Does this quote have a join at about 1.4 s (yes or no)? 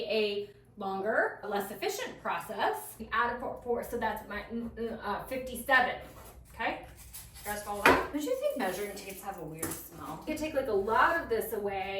no